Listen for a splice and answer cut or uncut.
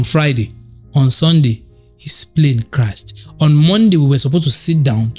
uncut